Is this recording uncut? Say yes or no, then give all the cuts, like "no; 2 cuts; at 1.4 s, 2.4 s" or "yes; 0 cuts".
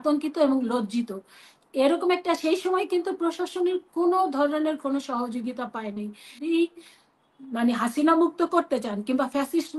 no; 1 cut; at 6.3 s